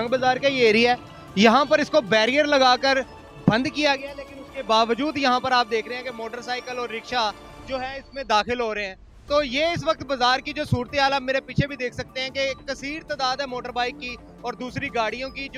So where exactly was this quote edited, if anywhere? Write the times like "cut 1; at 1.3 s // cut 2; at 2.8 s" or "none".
none